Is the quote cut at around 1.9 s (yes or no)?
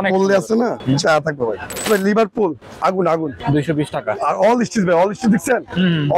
yes